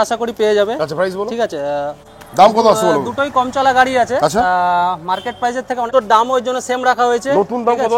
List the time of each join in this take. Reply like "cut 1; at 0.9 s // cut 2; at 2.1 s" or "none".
cut 1; at 2.2 s // cut 2; at 5.9 s